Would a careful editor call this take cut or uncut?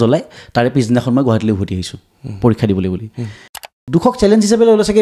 cut